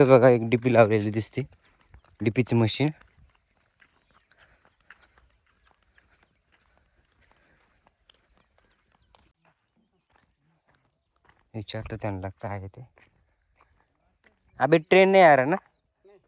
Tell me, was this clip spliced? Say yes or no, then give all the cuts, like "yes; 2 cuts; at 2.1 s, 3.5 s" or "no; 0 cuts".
no; 0 cuts